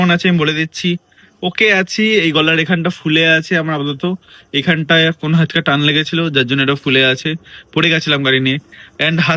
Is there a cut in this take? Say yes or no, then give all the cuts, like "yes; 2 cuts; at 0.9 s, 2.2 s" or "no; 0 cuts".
no; 0 cuts